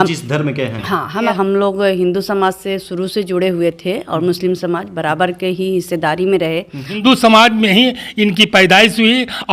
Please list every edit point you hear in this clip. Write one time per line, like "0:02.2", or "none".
0:01.3
0:07.0